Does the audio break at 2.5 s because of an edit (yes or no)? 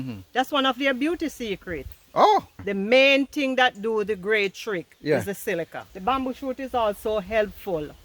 yes